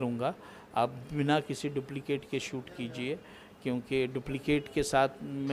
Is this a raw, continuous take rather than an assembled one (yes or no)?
yes